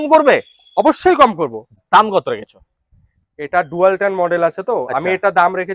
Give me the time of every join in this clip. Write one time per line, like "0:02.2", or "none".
0:01.8